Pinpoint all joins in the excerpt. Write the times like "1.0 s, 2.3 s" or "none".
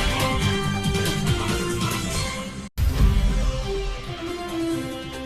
none